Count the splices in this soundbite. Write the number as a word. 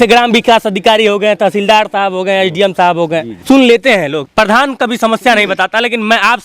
two